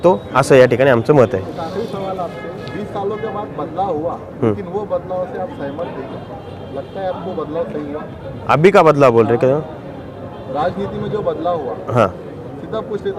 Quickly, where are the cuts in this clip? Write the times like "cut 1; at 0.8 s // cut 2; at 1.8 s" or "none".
none